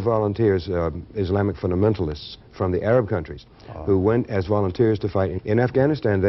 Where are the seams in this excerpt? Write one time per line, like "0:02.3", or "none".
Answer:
0:05.3